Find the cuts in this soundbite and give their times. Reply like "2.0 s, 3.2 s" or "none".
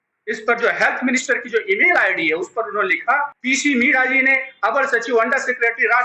3.3 s